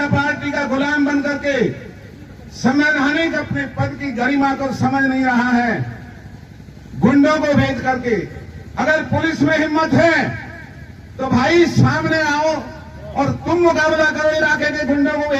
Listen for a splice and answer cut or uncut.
uncut